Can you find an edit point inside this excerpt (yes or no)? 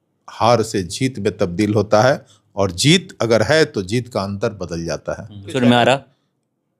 yes